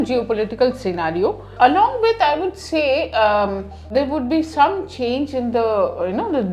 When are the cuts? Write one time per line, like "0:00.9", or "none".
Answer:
0:01.5
0:03.9